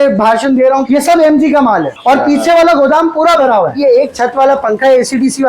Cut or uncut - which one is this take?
cut